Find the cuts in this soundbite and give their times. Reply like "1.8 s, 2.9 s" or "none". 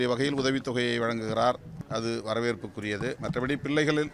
1.7 s, 3.2 s